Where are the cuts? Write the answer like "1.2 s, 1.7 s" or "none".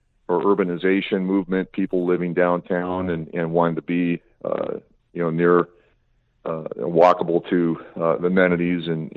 none